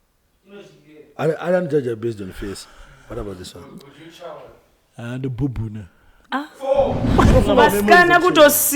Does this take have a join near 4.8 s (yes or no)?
no